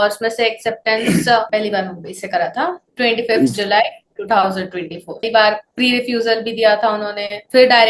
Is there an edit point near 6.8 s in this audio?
no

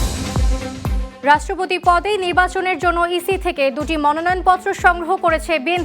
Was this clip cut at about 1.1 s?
yes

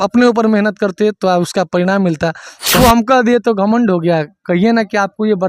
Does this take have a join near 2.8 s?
yes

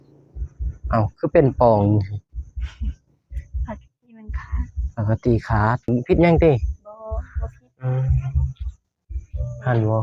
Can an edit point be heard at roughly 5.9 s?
yes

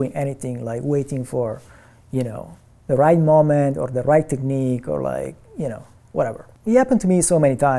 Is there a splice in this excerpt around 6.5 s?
yes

